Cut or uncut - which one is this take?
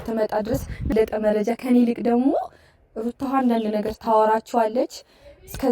cut